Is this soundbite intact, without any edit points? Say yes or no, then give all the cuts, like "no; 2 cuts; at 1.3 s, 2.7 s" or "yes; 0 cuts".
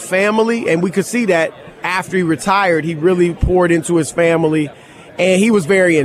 no; 1 cut; at 1.8 s